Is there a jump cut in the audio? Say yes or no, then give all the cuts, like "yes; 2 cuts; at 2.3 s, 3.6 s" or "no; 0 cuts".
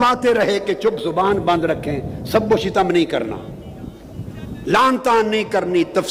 no; 0 cuts